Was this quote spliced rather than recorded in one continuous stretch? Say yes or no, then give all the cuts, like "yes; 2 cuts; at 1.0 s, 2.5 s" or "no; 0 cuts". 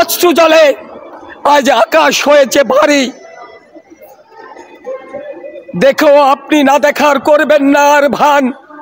no; 0 cuts